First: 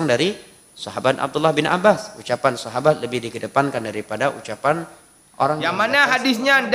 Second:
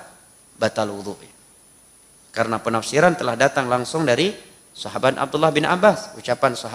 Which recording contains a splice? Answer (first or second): first